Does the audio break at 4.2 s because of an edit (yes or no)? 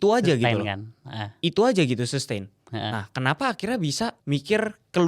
yes